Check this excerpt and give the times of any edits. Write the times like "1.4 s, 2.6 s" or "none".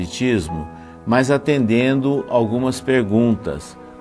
1.1 s